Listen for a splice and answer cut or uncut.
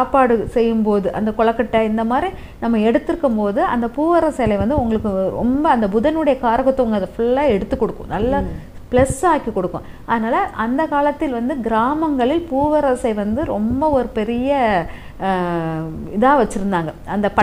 uncut